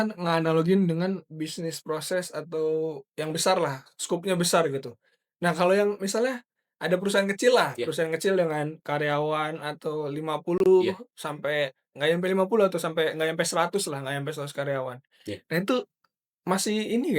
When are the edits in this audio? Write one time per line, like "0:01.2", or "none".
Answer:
none

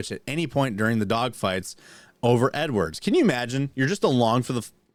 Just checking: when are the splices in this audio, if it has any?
none

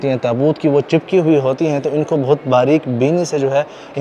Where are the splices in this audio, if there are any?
none

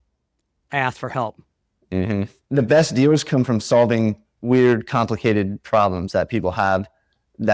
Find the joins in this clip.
0:02.4

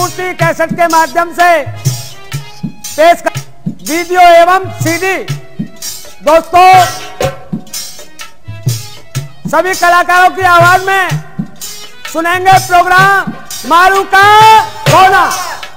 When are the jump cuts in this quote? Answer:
0:03.2

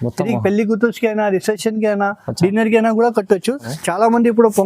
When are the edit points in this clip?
0:03.7

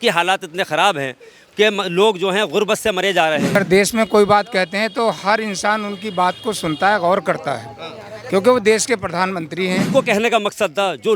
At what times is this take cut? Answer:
0:03.6
0:09.9

